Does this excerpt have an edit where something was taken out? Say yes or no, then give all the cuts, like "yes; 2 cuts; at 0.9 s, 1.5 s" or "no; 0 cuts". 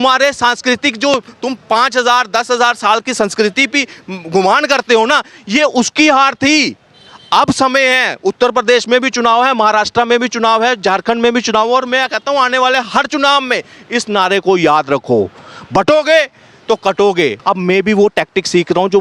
yes; 1 cut; at 17.4 s